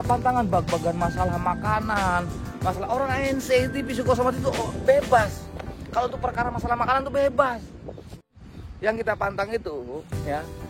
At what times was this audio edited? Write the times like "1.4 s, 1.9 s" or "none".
8.2 s